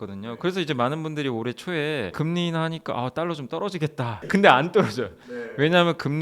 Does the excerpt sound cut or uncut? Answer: cut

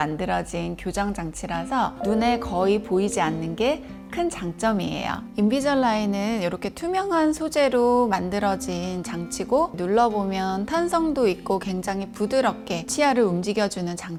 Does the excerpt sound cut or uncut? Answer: uncut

